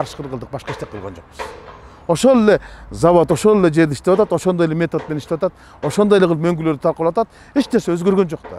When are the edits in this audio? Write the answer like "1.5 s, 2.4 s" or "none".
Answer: none